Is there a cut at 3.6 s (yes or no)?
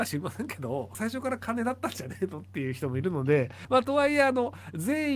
yes